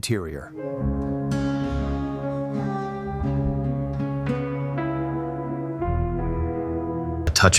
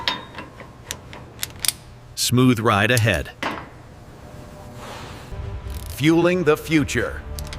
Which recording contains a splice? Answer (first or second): second